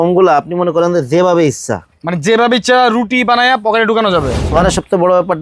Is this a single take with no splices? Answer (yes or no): no